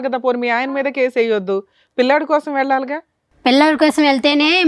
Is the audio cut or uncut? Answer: uncut